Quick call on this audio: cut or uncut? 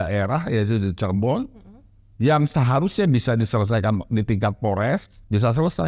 uncut